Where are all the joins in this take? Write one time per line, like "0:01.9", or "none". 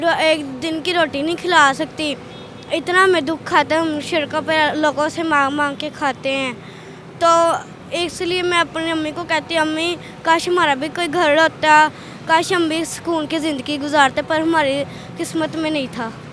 none